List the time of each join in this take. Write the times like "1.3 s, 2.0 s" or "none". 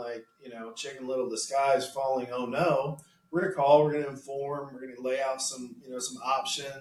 none

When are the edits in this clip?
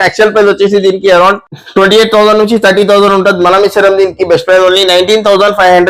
none

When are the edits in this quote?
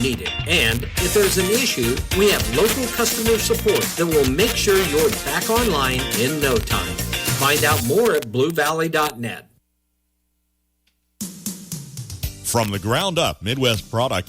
9.9 s

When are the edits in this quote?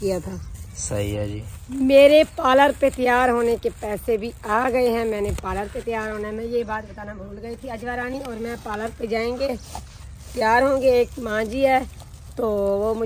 1.5 s

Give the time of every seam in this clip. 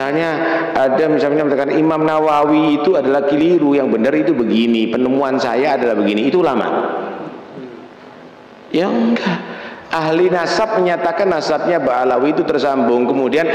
none

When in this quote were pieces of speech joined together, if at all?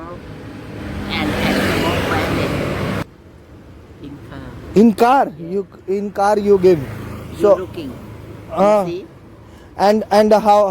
3.1 s

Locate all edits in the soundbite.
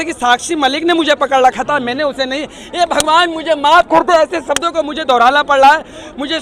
none

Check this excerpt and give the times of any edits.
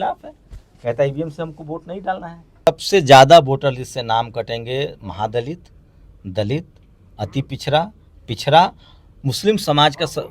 2.7 s

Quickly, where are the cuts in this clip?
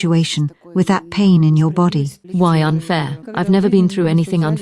2.2 s, 3.2 s

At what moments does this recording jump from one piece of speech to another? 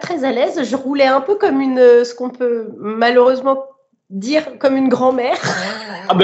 none

